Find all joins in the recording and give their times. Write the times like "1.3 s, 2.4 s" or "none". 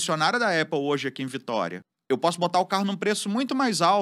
1.9 s